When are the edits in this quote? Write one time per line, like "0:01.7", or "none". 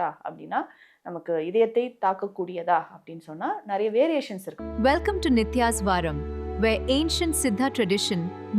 0:04.4